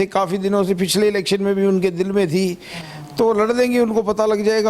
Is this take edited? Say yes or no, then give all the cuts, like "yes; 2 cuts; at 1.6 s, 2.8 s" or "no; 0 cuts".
yes; 1 cut; at 2.7 s